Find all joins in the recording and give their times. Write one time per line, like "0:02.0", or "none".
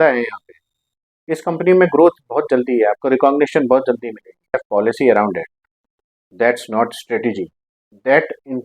0:04.6